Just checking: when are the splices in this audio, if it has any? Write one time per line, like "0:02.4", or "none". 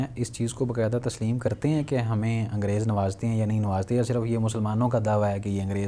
none